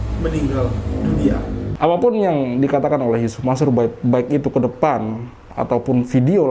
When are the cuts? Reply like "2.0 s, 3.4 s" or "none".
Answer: 1.6 s